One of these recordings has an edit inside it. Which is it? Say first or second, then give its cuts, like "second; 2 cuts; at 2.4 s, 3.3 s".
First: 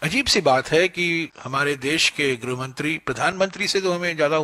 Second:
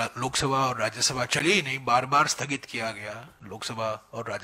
first; 1 cut; at 1.4 s